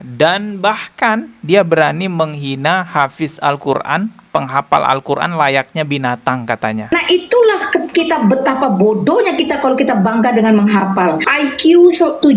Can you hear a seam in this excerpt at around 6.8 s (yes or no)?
yes